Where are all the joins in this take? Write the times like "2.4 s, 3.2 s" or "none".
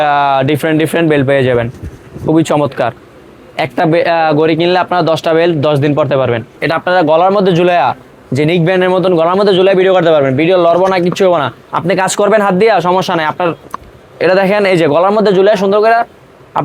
6.5 s, 13.7 s